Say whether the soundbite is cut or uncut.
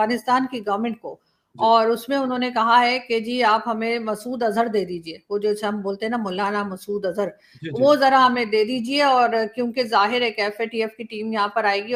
uncut